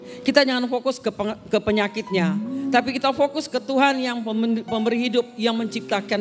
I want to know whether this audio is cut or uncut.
uncut